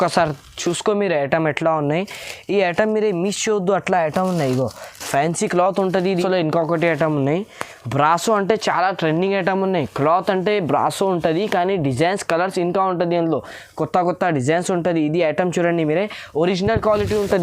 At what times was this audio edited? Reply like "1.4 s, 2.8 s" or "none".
6.1 s